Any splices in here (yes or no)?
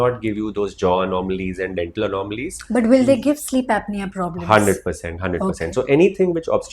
no